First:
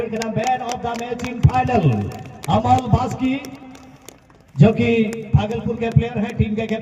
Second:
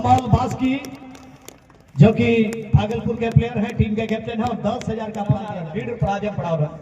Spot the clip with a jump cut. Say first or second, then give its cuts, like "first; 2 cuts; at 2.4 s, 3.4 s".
second; 1 cut; at 5.6 s